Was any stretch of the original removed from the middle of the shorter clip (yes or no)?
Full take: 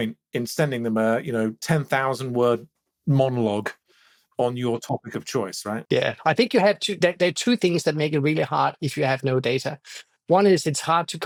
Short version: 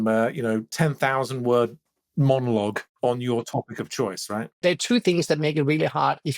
yes